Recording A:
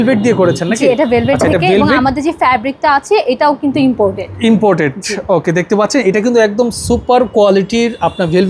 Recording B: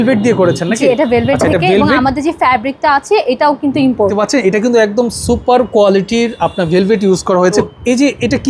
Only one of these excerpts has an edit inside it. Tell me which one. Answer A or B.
B